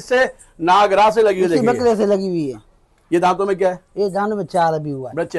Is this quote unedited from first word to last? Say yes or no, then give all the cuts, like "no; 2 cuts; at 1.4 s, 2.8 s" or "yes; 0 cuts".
yes; 0 cuts